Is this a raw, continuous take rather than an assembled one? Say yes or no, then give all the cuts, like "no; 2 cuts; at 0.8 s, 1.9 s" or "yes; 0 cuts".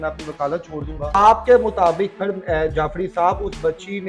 no; 1 cut; at 1.1 s